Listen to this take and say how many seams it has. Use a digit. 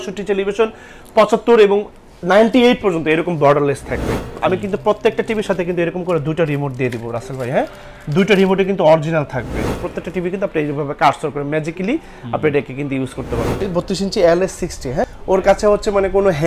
4